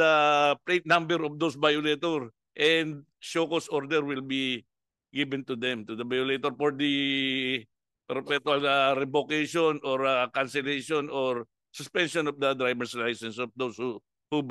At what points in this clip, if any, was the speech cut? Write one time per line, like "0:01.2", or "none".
none

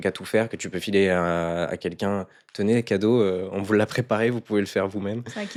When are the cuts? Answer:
none

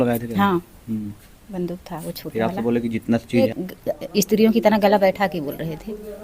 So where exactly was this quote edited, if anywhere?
0:03.5

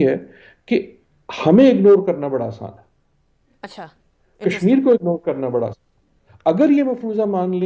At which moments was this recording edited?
none

